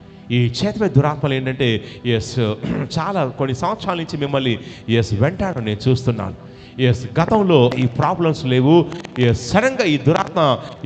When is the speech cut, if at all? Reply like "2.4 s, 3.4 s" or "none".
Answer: 7.7 s